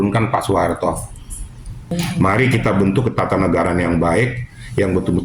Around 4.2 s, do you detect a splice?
no; 1 cut; at 1.9 s

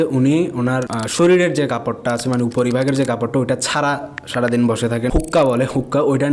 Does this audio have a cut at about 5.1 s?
yes; 1 cut; at 5.1 s

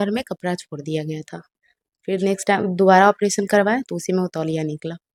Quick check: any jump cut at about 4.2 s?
no; 0 cuts

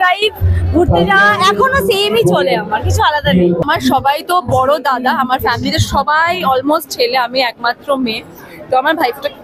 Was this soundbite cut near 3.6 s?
yes; 1 cut; at 3.6 s

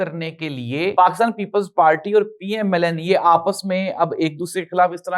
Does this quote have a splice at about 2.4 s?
no; 1 cut; at 0.9 s

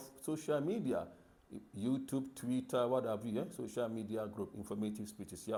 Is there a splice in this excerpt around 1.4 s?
no; 0 cuts

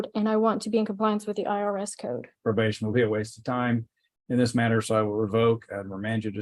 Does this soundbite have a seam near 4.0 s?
no; 1 cut; at 2.3 s

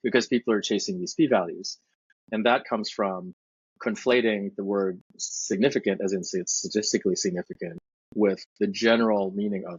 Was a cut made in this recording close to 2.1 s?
yes; 1 cut; at 2.1 s

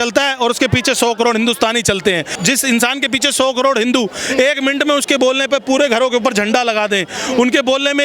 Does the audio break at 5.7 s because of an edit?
no; 1 cut; at 2.3 s

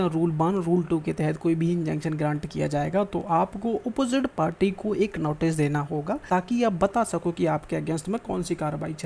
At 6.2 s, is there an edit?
yes; 1 cut; at 6.2 s

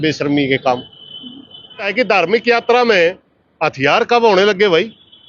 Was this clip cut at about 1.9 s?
yes; 1 cut; at 1.9 s

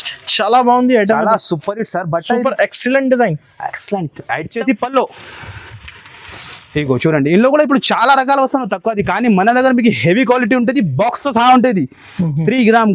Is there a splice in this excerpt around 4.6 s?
yes; 1 cut; at 4.6 s

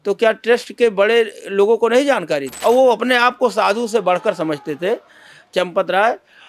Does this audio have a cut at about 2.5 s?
yes; 1 cut; at 2.5 s

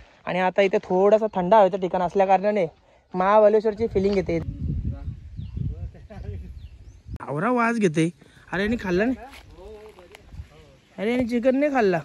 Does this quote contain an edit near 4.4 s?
yes; 2 cuts; at 4.4 s, 7.2 s

